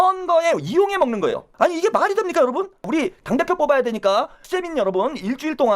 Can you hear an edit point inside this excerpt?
yes; 3 cuts; at 1.5 s, 2.8 s, 4.5 s

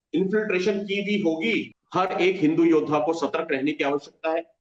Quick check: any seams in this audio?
yes; 1 cut; at 1.8 s

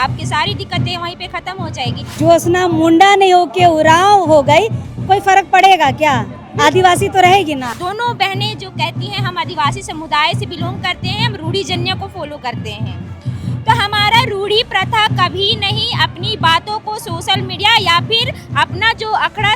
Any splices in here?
yes; 2 cuts; at 2.1 s, 7.7 s

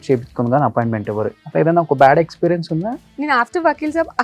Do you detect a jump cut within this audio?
yes; 2 cuts; at 1.4 s, 3.1 s

